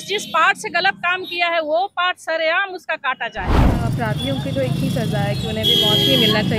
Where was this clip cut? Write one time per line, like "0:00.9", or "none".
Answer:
0:03.6